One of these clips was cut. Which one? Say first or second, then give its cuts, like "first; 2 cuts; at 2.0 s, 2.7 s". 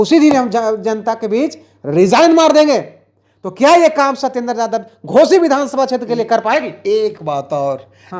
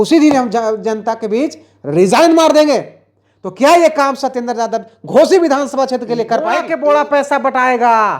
second; 1 cut; at 6.7 s